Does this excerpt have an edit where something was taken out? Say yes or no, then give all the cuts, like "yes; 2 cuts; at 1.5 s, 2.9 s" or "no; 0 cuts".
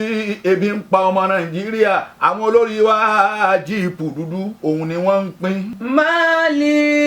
yes; 1 cut; at 5.8 s